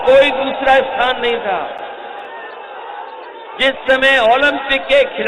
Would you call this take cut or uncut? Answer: uncut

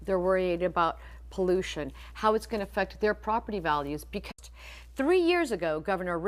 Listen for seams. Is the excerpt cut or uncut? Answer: uncut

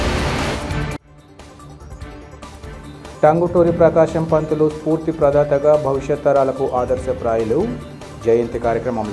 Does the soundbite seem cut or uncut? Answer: uncut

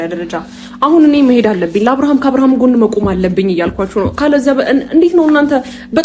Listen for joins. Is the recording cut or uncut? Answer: uncut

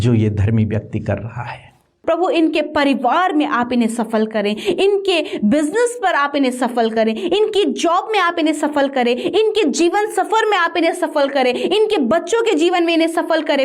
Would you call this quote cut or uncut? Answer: cut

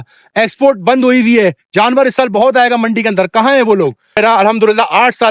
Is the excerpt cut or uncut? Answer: cut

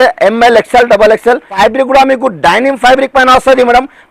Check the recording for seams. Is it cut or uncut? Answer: cut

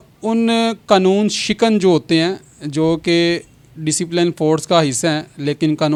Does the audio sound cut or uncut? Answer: uncut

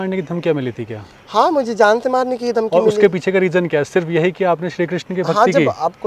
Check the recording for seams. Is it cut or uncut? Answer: uncut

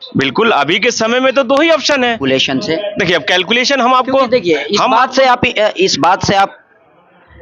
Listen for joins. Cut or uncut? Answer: cut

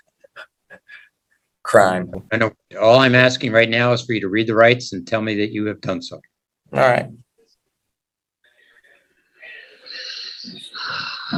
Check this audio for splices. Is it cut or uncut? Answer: uncut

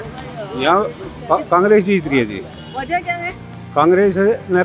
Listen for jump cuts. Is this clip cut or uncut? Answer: uncut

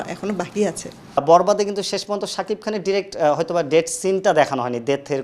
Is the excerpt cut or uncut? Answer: cut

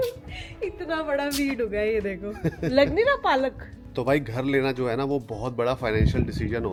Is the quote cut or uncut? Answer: uncut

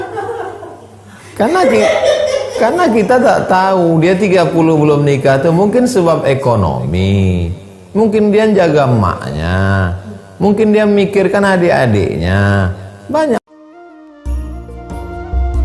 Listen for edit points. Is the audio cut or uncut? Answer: cut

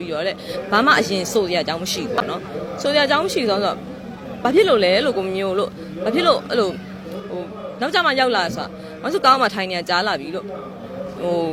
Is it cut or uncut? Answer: uncut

